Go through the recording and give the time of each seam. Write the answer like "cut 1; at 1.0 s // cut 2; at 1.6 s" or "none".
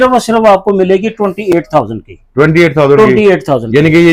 none